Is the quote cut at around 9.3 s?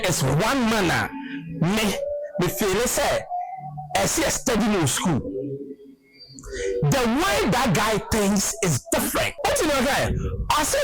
yes; 1 cut; at 9.3 s

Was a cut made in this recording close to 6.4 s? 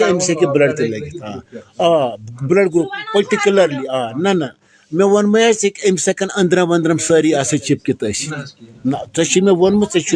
no; 0 cuts

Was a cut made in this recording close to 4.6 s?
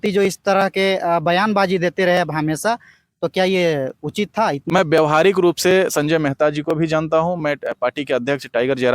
yes; 1 cut; at 4.6 s

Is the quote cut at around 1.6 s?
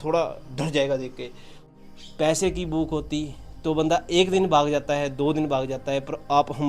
yes; 1 cut; at 1.6 s

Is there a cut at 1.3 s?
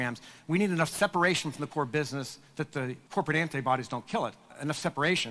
no; 2 cuts; at 3.0 s, 4.5 s

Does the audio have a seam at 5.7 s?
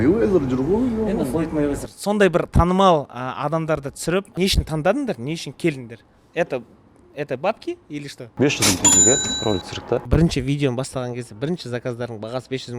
no; 3 cuts; at 4.3 s, 8.3 s, 10.0 s

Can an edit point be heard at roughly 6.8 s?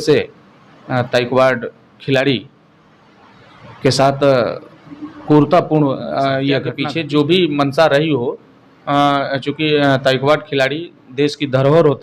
yes; 1 cut; at 6.8 s

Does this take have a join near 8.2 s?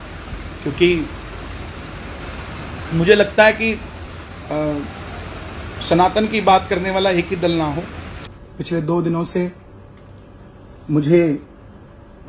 yes; 1 cut; at 8.2 s

